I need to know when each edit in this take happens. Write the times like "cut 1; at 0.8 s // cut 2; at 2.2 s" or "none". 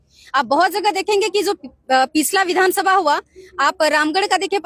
none